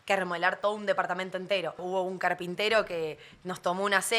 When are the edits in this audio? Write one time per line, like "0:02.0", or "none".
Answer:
0:01.8